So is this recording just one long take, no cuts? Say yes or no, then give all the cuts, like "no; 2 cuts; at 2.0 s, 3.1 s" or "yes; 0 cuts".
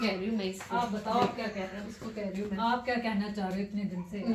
yes; 0 cuts